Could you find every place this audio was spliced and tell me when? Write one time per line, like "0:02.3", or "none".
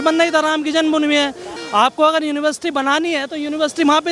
0:01.5